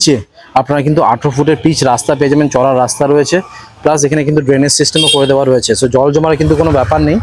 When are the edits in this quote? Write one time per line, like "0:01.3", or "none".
none